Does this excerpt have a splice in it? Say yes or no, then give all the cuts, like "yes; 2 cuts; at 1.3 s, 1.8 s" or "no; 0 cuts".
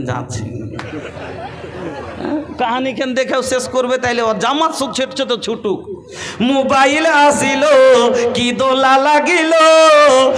no; 0 cuts